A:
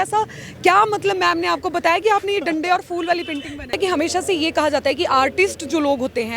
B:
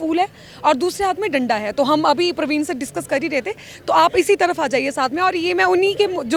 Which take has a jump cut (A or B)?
A